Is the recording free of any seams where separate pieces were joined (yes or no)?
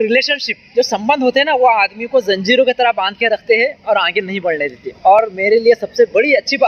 yes